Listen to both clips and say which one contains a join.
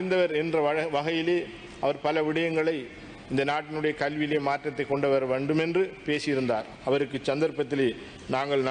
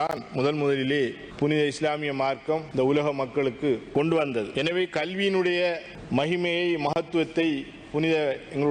second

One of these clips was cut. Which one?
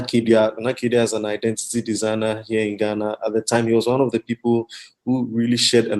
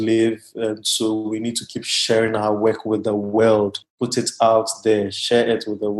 second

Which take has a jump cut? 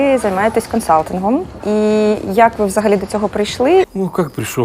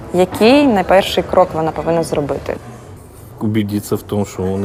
first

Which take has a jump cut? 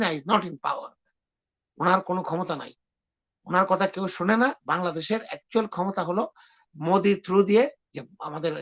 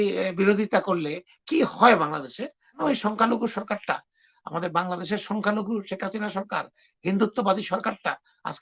second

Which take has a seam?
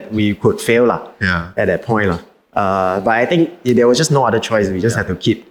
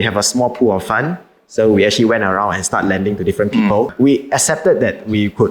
second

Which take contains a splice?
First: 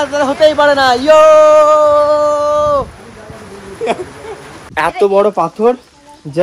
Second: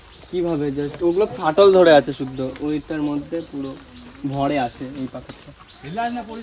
first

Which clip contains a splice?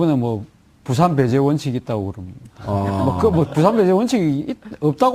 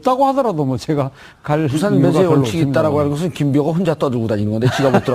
second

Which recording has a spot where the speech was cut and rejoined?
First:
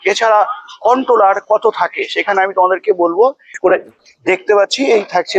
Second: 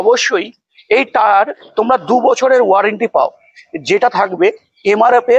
first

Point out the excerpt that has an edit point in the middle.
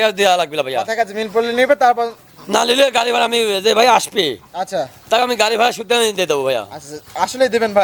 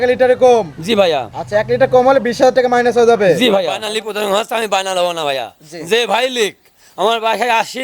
second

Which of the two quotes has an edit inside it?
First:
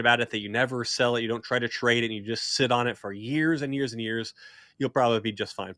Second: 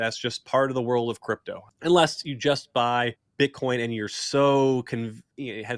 second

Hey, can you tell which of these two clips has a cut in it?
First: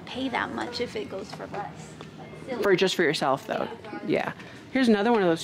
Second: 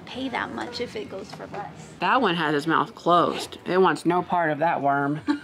second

